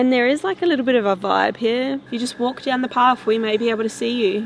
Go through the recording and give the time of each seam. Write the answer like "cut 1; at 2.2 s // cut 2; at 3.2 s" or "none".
cut 1; at 2.0 s